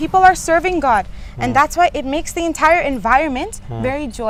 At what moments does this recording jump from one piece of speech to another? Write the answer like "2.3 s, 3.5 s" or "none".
none